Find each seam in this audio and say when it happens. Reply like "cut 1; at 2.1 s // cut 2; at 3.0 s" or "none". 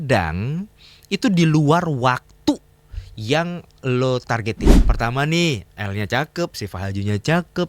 cut 1; at 4.7 s